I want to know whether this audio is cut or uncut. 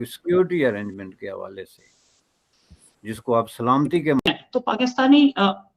cut